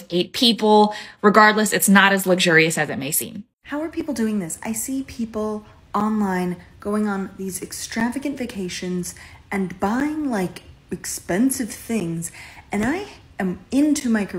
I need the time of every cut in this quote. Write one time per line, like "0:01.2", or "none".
0:03.5